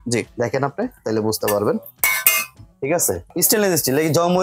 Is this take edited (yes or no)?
yes